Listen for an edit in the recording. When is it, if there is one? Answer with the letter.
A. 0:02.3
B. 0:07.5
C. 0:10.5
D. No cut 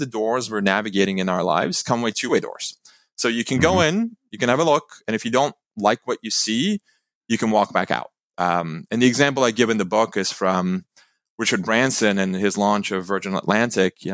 A